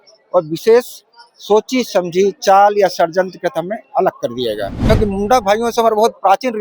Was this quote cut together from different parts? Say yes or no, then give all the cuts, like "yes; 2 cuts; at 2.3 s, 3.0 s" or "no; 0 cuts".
yes; 1 cut; at 4.8 s